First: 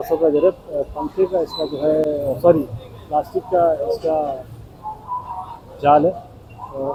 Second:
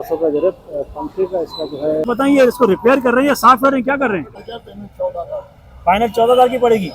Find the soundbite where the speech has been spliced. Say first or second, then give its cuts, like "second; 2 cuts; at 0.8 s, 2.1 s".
second; 2 cuts; at 2.0 s, 4.4 s